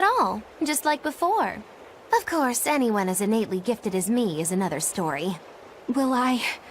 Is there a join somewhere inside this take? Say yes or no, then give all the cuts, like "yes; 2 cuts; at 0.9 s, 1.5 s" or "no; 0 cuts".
yes; 1 cut; at 4.6 s